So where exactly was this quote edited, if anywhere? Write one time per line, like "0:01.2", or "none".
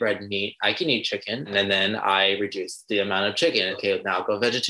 0:01.5
0:03.8